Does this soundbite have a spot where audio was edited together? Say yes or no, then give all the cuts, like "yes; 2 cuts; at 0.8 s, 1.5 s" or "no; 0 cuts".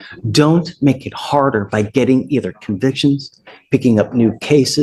no; 0 cuts